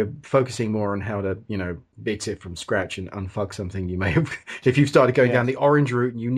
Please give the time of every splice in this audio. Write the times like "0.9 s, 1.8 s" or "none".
1.9 s